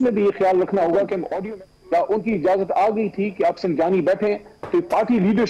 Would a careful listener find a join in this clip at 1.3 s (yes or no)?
yes